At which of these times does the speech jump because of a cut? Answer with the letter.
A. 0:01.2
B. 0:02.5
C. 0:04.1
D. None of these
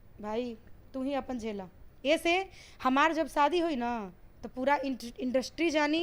D